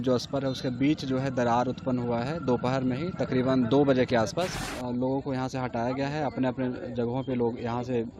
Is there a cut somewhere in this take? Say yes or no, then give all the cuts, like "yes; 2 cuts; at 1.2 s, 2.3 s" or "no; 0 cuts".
yes; 1 cut; at 4.7 s